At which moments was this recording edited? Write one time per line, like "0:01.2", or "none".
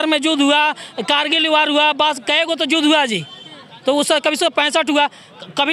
none